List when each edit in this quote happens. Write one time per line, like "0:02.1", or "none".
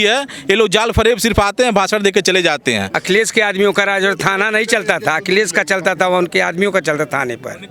0:02.9